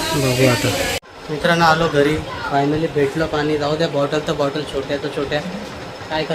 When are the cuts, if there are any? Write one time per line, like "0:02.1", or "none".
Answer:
0:01.1